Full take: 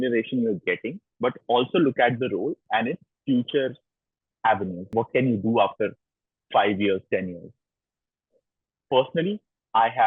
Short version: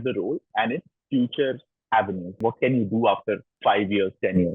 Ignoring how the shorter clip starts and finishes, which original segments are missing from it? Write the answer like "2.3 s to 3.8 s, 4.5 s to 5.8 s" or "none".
3.9 s to 4.2 s, 6.0 s to 6.4 s